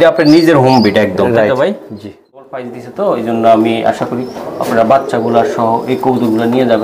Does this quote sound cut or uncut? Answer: cut